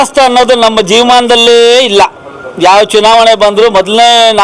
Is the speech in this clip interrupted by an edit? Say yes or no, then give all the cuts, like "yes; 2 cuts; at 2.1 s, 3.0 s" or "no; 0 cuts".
no; 0 cuts